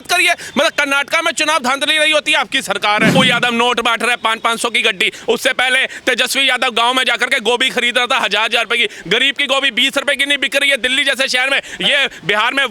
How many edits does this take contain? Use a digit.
1